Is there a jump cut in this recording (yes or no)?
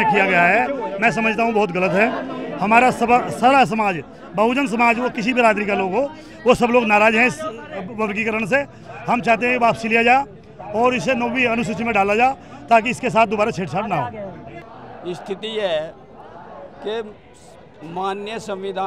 no